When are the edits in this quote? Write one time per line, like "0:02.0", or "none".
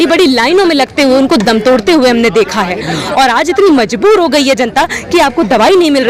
none